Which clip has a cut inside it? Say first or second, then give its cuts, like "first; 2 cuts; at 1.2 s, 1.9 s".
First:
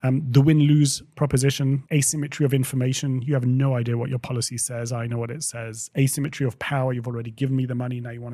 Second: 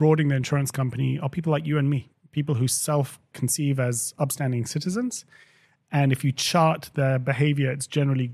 first; 1 cut; at 1.8 s